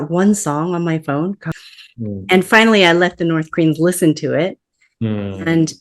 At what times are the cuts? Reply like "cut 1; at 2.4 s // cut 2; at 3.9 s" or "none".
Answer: cut 1; at 1.4 s